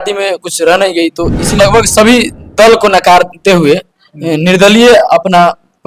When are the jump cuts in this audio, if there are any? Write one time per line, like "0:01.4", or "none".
0:01.5